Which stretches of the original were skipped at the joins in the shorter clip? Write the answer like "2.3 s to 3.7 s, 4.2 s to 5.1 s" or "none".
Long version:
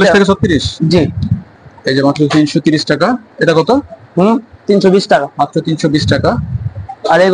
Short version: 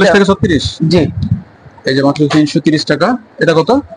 none

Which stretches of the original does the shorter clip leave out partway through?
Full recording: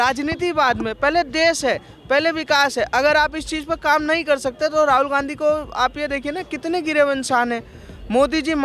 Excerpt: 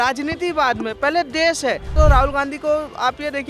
1.9 s to 4.7 s

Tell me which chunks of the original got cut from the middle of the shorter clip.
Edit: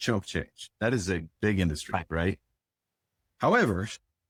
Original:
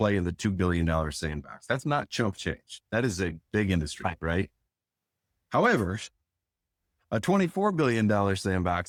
none

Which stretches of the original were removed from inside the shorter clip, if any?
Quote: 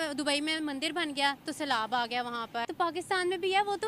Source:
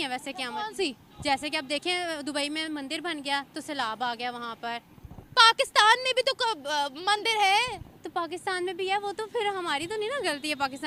4.7 s to 8.0 s

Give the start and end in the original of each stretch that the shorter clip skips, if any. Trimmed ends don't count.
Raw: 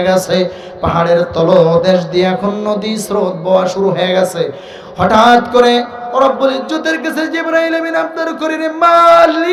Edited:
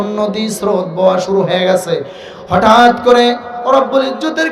none

